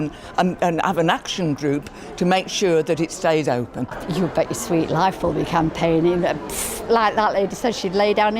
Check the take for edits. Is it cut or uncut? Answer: cut